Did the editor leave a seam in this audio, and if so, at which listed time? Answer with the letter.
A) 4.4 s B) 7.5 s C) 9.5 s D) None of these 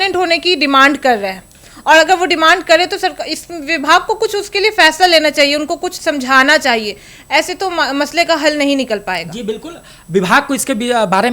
D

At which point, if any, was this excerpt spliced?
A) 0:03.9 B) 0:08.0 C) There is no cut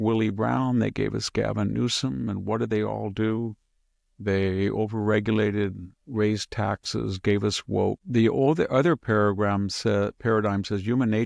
B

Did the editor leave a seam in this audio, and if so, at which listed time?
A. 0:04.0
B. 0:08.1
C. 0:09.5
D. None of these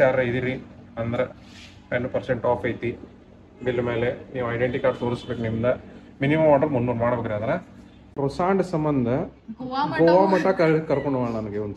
B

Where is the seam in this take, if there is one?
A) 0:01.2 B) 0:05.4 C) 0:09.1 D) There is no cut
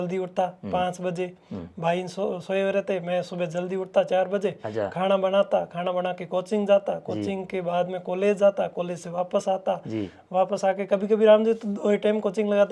D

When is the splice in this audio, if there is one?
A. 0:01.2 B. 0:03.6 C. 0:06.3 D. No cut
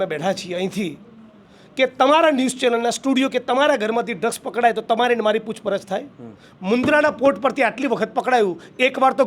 D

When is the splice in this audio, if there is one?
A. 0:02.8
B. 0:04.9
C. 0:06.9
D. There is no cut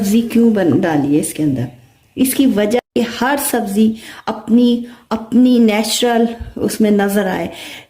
A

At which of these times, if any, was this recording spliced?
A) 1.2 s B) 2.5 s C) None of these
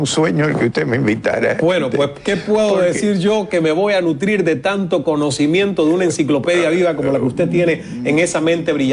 C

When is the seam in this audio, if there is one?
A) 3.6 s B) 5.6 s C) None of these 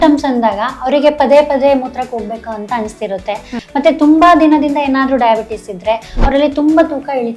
A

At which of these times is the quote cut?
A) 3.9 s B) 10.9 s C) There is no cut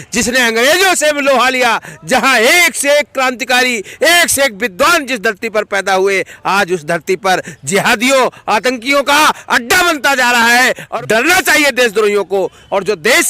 B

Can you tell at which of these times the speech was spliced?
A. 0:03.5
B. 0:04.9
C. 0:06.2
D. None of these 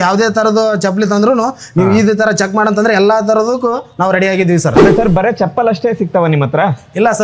B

